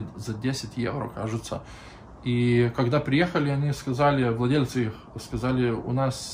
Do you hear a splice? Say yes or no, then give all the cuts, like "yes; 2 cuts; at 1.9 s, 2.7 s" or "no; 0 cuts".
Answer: no; 0 cuts